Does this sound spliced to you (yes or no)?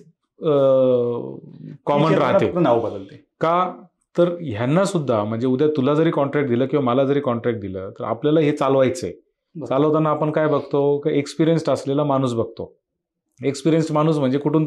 no